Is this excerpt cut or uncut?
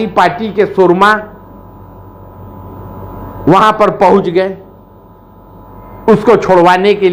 uncut